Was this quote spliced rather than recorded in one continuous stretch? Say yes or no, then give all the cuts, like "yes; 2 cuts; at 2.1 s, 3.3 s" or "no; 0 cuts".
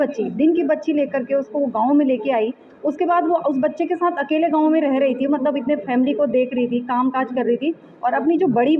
no; 0 cuts